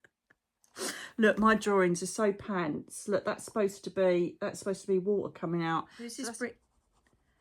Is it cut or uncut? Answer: cut